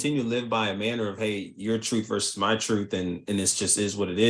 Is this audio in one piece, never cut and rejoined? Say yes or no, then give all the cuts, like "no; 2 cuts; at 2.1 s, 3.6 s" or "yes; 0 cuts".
yes; 0 cuts